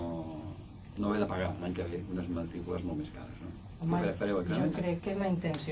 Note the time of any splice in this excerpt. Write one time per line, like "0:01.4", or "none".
0:03.9